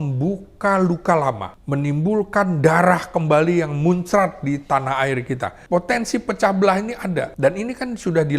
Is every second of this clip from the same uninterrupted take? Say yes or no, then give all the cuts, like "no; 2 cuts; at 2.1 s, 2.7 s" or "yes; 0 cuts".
no; 3 cuts; at 1.5 s, 5.6 s, 7.3 s